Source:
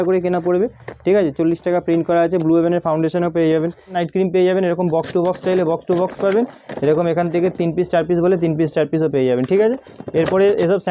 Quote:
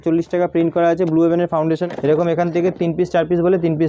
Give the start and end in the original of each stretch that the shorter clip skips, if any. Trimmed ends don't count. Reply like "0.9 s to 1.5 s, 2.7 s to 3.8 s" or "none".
3.2 s to 6.6 s